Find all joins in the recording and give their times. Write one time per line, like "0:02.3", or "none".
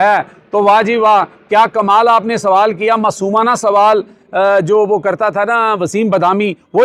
none